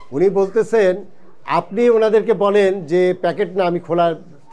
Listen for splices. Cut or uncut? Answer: uncut